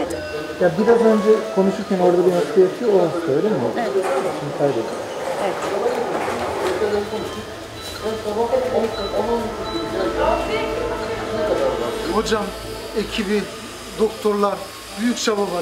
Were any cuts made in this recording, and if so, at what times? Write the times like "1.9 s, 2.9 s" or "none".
12.1 s